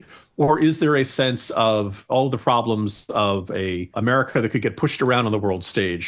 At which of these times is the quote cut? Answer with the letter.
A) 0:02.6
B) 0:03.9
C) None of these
B